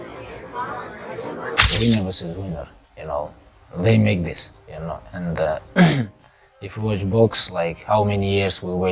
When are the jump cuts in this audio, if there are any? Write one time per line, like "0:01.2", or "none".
0:01.4